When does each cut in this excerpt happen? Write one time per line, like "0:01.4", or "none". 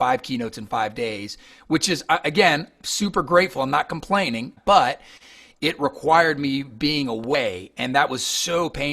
0:04.6